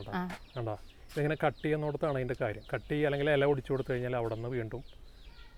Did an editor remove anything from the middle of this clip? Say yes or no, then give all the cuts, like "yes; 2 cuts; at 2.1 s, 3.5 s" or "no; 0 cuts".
no; 0 cuts